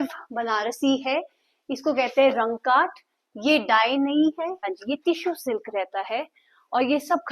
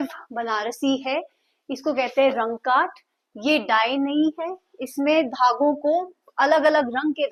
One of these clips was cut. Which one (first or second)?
first